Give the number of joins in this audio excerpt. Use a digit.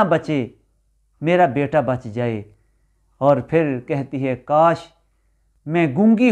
0